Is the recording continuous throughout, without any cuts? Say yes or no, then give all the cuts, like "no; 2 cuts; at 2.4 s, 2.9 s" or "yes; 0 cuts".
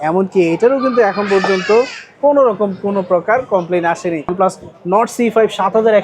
no; 1 cut; at 4.3 s